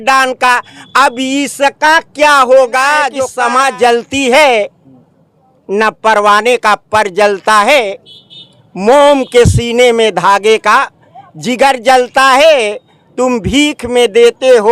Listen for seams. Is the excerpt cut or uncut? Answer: cut